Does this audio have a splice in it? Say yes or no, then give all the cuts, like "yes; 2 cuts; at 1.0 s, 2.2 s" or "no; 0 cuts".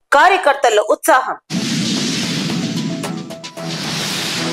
no; 0 cuts